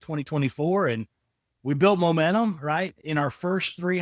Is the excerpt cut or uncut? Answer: uncut